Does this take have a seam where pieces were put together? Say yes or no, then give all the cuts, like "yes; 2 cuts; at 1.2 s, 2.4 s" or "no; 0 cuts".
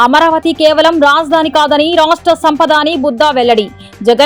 no; 0 cuts